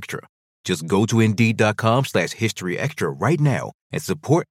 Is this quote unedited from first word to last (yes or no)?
yes